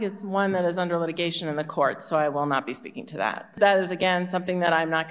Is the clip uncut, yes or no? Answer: no